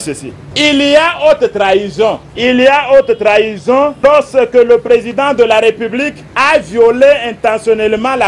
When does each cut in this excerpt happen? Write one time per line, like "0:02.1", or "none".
none

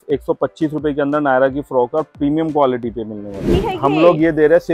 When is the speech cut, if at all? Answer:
0:03.5

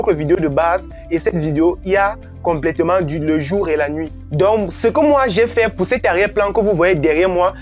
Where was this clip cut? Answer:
none

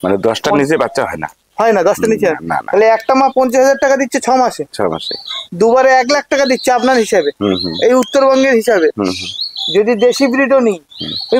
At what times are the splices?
none

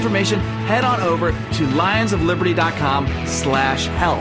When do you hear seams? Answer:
none

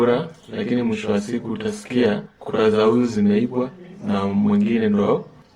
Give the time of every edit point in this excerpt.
0:02.3

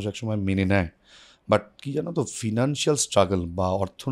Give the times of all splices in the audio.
none

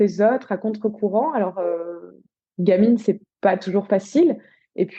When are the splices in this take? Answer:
none

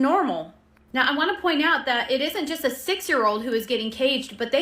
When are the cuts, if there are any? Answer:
none

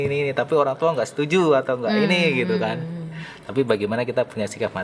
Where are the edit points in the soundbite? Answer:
none

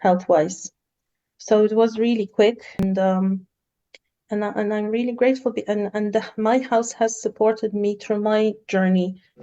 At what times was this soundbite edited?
0:02.9

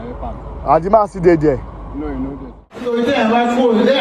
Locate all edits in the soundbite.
0:02.9

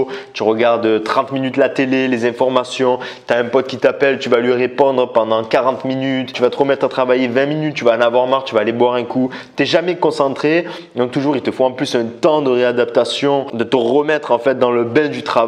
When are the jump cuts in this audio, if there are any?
0:06.3
0:13.5

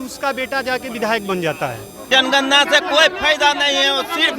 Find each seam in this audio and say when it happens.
0:02.0

